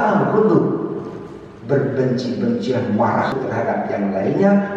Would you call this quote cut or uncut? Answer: cut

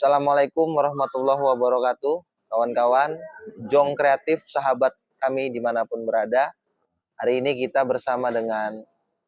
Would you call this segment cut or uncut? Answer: uncut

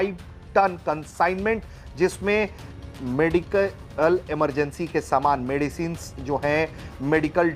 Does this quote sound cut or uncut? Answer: uncut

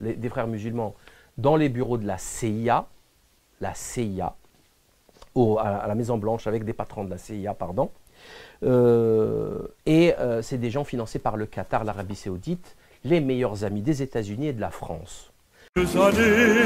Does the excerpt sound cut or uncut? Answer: cut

